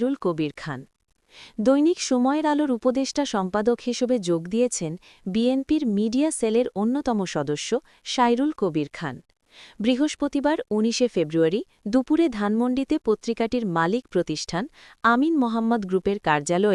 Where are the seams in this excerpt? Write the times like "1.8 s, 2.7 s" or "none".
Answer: none